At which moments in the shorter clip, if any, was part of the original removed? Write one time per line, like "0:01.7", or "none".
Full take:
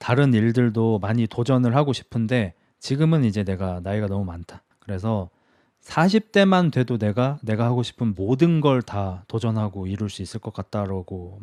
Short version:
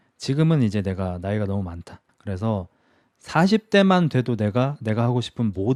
none